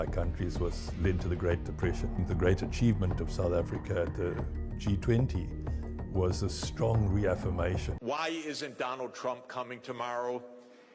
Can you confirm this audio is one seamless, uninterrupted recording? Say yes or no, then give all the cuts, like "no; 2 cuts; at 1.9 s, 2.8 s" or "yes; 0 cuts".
no; 1 cut; at 7.9 s